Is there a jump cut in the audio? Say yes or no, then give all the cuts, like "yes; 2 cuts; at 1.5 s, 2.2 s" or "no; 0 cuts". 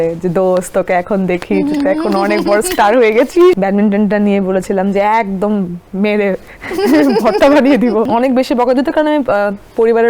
yes; 2 cuts; at 3.5 s, 8.1 s